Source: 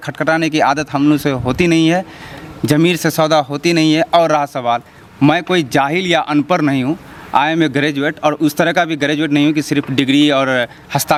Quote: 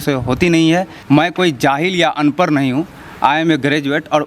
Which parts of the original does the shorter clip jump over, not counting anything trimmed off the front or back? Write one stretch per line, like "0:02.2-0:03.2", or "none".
0:02.1-0:05.0